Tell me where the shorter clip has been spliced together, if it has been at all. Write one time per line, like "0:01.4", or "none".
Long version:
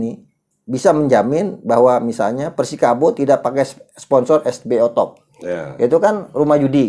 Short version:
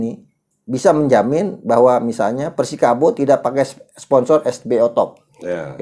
none